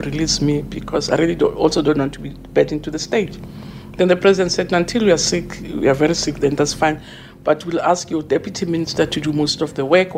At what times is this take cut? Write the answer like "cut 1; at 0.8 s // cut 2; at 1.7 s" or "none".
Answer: none